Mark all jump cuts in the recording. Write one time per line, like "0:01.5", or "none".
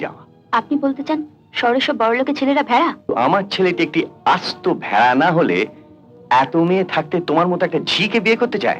0:03.1